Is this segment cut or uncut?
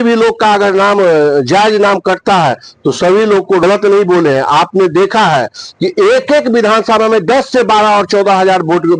cut